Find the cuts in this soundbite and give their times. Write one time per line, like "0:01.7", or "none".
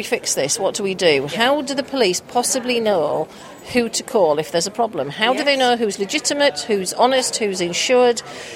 none